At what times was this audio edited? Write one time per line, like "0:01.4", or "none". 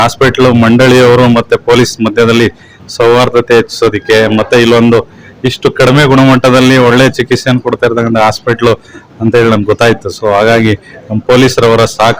none

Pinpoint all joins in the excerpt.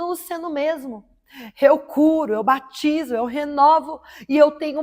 none

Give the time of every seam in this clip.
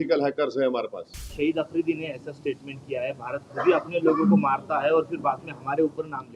0:01.2

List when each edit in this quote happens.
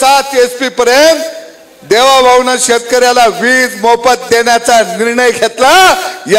none

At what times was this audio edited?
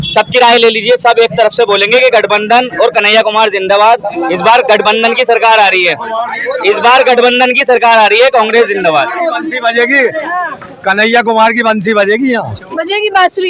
none

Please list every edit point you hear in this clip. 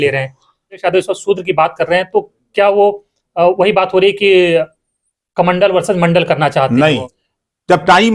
0:00.8
0:07.1

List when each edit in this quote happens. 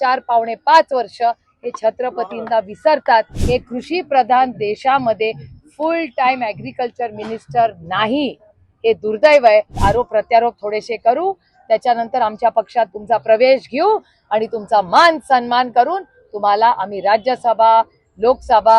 0:03.4
0:09.8

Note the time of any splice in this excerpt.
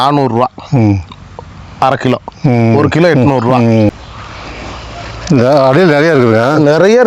0:03.9

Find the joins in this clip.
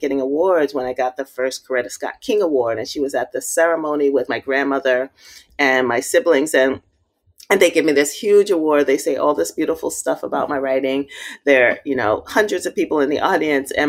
0:04.3

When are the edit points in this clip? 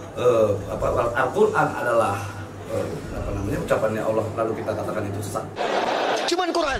0:05.5

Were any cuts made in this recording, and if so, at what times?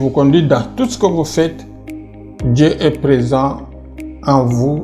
none

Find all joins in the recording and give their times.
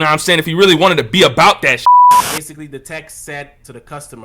0:02.3

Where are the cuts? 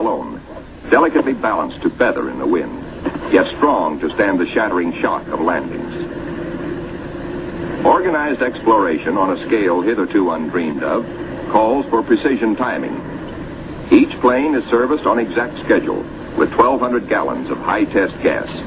none

